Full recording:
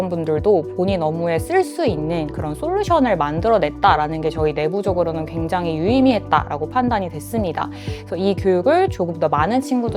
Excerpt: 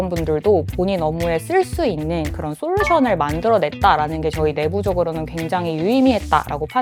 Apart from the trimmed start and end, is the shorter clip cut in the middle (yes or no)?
no